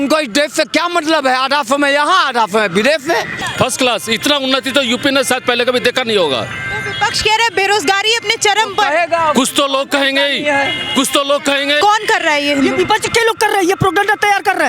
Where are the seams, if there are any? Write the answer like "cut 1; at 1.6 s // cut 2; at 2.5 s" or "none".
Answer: cut 1; at 3.3 s // cut 2; at 11.8 s